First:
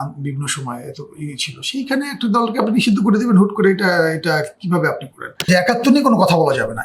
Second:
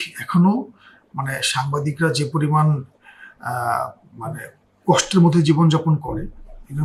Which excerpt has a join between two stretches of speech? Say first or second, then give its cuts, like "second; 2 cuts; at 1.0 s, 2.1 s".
first; 1 cut; at 5.5 s